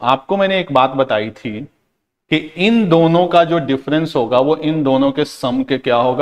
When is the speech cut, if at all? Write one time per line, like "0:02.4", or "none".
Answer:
none